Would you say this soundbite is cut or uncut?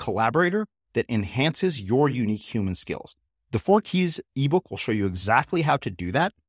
uncut